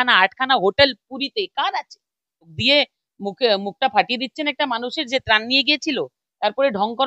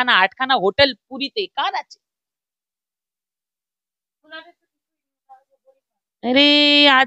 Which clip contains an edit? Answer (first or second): first